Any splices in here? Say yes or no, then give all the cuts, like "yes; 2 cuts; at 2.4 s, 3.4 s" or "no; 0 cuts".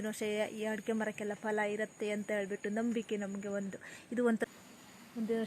yes; 1 cut; at 4.4 s